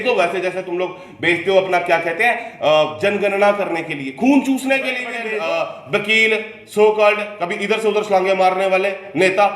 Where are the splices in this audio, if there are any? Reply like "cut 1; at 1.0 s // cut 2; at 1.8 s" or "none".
cut 1; at 5.2 s